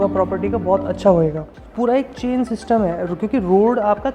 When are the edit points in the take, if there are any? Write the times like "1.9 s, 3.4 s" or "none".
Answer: 1.6 s

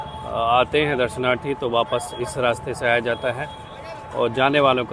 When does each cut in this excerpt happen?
none

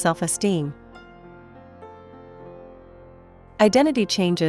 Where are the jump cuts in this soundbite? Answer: 0.8 s, 3.2 s

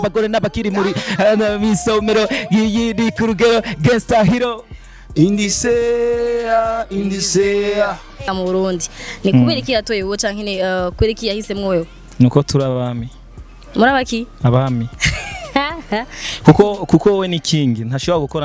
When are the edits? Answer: 8.3 s

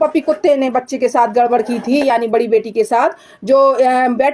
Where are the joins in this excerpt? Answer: none

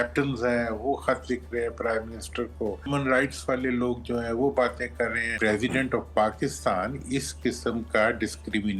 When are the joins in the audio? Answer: 2.9 s, 5.3 s

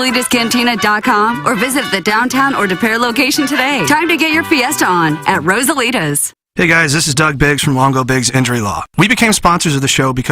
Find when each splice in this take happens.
6.4 s

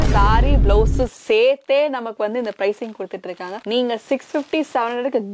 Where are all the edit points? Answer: none

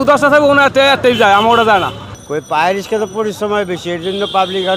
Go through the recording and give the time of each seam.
none

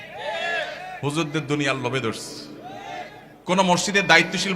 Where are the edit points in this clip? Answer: 3.3 s

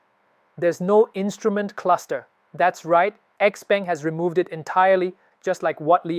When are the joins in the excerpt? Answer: none

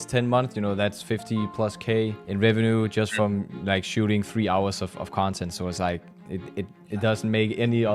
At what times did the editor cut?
none

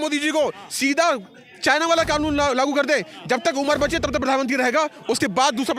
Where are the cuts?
none

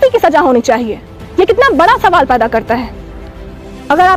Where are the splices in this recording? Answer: none

